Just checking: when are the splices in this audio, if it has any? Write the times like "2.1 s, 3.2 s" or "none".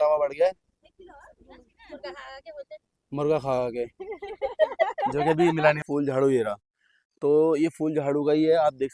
5.8 s